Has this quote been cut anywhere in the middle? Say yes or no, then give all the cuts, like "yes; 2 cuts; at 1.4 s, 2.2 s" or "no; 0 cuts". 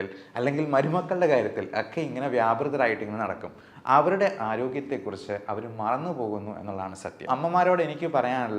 yes; 1 cut; at 7.3 s